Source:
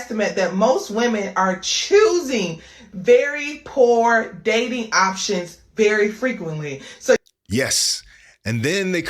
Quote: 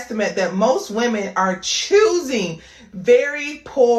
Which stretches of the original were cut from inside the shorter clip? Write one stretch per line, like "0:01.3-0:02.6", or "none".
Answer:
none